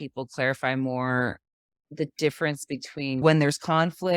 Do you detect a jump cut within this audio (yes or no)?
yes